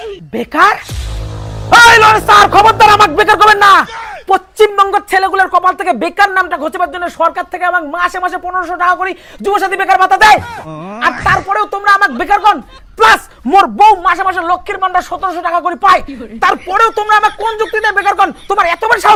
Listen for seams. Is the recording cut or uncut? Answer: uncut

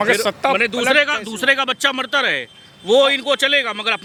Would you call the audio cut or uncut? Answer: uncut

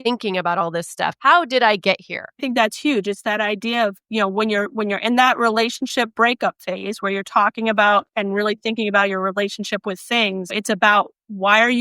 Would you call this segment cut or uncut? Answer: cut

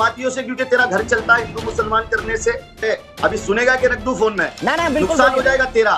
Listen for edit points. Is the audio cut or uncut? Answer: cut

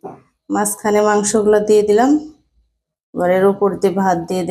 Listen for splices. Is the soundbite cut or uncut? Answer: uncut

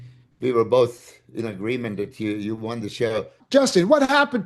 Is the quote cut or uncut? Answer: cut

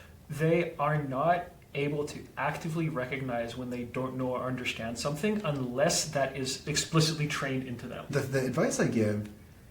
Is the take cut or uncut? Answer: cut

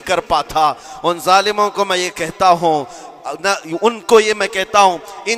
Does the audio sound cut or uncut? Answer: uncut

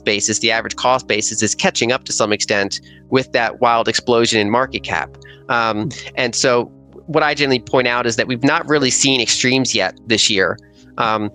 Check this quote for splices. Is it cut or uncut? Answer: uncut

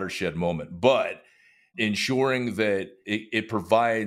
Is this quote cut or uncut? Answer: cut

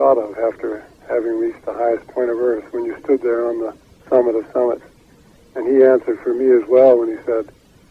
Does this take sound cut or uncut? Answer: uncut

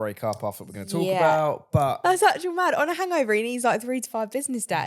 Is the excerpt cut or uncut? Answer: cut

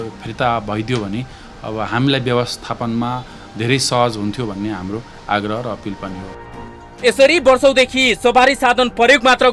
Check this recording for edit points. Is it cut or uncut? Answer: uncut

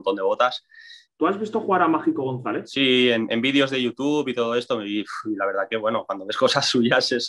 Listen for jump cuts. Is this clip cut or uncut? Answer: cut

